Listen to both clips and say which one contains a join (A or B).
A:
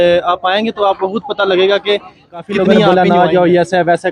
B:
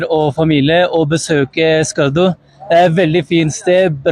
A